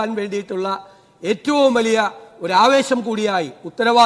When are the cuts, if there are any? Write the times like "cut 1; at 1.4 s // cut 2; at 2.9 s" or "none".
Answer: none

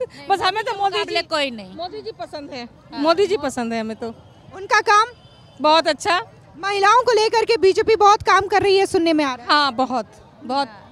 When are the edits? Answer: none

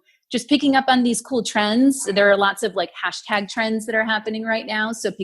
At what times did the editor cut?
none

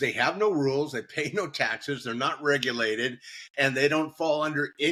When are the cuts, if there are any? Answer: none

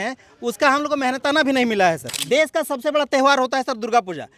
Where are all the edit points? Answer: cut 1; at 2.1 s

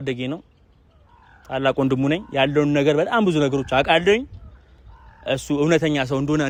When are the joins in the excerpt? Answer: none

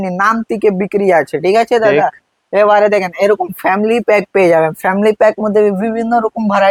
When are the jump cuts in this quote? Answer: none

